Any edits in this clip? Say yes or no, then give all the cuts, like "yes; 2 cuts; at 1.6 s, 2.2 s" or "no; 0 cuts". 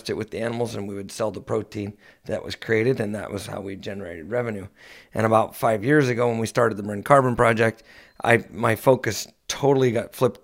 no; 0 cuts